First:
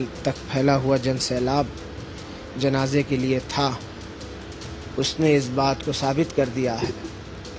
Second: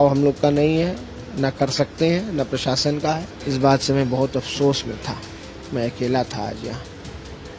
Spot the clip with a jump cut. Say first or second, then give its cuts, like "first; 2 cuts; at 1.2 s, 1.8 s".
second; 1 cut; at 3.3 s